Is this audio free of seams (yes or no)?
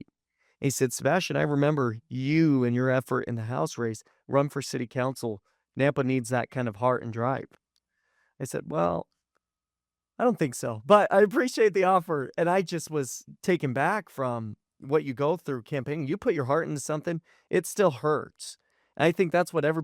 yes